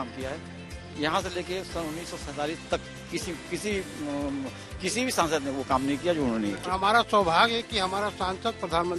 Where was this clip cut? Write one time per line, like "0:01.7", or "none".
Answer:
0:06.7